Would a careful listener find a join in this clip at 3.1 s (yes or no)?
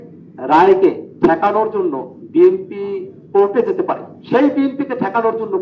yes